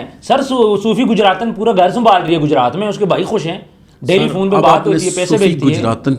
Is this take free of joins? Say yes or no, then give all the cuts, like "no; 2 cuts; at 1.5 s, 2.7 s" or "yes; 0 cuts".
yes; 0 cuts